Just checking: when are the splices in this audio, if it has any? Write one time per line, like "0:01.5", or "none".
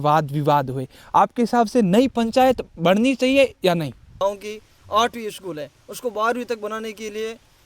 0:04.2